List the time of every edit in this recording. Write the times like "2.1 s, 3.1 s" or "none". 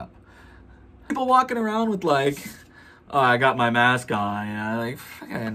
1.1 s

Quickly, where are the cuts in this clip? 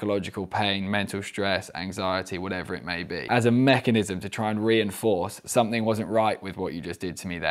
3.2 s

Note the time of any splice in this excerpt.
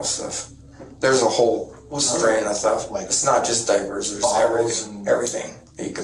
none

